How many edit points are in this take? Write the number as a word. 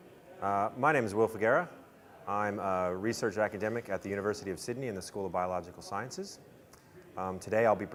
zero